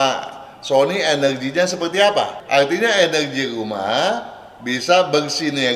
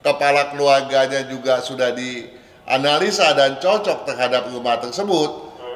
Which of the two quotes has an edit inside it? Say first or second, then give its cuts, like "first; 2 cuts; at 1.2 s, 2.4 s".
first; 1 cut; at 2.4 s